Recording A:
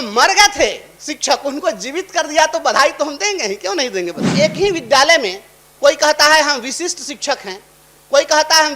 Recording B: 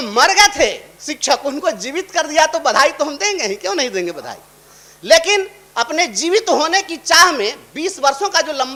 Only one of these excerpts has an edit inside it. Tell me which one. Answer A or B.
A